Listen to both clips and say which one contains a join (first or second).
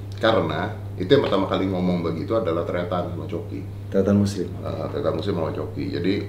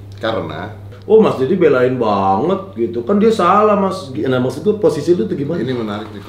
second